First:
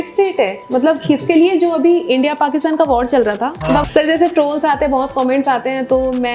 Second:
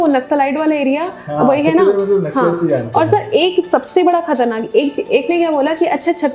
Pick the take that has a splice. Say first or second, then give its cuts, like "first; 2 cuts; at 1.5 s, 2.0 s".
first; 1 cut; at 3.8 s